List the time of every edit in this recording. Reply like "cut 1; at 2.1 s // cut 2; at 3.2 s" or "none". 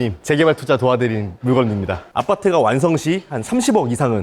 cut 1; at 2.1 s